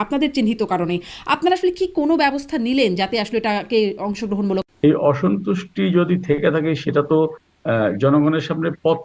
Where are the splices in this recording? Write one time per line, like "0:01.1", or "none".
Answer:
0:04.7